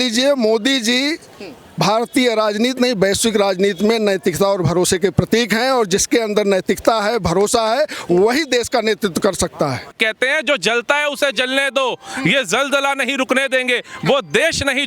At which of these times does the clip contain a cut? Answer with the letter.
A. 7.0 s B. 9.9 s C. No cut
B